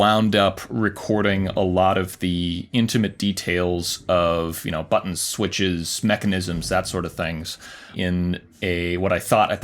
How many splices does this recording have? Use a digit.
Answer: 1